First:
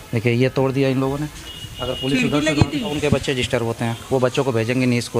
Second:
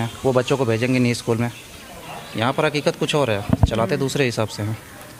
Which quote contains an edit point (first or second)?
first